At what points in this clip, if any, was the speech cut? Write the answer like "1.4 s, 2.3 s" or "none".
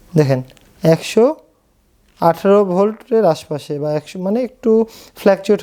none